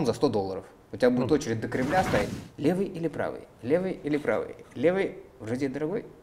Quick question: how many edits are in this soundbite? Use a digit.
1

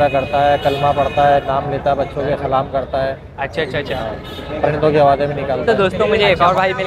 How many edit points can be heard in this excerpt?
1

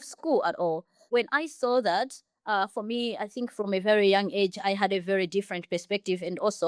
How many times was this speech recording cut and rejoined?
1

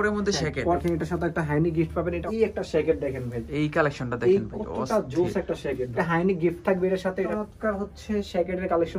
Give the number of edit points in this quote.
4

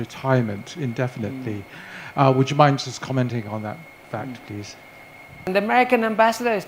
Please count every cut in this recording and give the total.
1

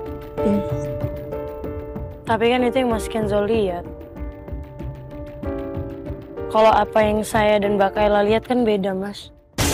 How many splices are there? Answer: 0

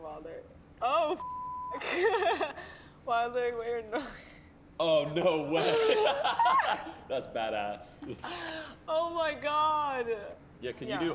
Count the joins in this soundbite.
0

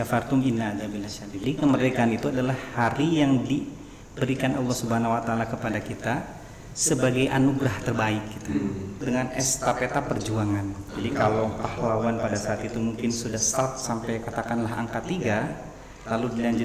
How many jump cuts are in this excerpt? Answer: 2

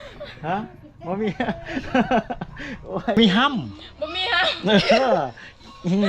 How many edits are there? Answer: 1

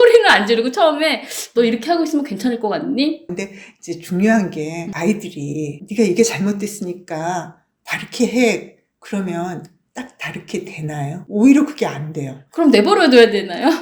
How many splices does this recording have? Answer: 2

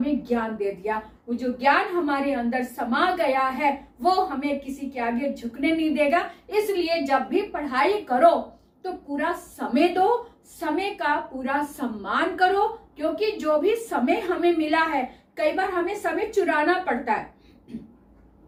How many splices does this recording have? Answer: 0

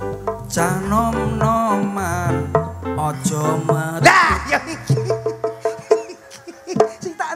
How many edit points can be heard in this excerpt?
0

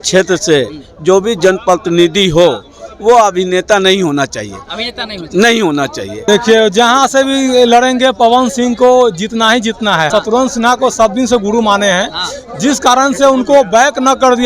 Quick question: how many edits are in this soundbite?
2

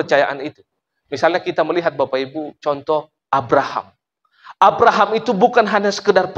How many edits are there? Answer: 0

